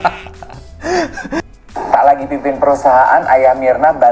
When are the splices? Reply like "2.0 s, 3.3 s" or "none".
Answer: 1.5 s